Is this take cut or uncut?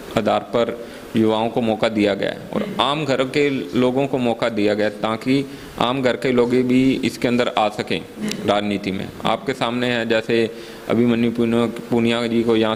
uncut